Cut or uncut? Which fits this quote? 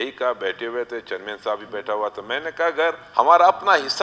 cut